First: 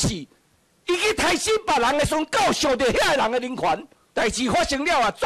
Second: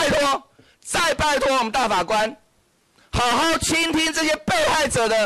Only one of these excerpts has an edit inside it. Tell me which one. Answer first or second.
first